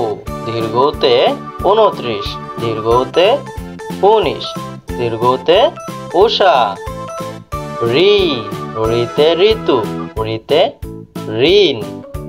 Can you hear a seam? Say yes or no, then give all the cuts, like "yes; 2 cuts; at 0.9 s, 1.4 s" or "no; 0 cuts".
no; 0 cuts